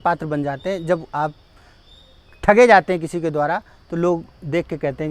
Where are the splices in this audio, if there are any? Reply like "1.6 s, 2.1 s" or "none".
none